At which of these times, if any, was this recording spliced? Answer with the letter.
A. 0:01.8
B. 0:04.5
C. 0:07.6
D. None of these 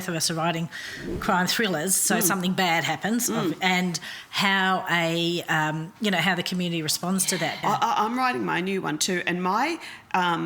C